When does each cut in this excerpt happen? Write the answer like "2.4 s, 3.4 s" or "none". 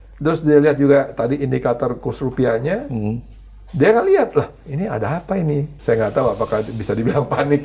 5.7 s